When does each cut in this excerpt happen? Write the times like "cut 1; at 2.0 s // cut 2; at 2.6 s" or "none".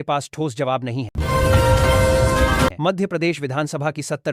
cut 1; at 1.1 s // cut 2; at 2.8 s